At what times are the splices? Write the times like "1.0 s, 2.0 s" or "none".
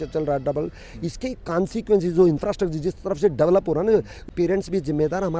4.2 s